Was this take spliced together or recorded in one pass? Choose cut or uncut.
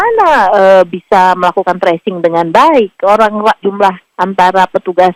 uncut